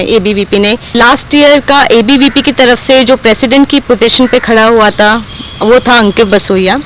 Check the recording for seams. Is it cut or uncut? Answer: cut